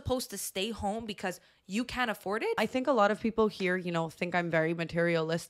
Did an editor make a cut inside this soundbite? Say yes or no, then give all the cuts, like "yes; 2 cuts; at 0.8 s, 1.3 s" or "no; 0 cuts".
yes; 1 cut; at 2.6 s